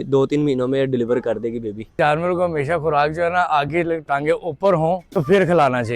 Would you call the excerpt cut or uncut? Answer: cut